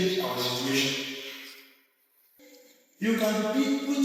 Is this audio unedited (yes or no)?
no